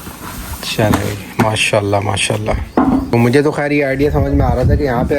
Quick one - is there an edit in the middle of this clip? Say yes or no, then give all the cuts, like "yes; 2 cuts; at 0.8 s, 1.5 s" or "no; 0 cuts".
yes; 1 cut; at 3.1 s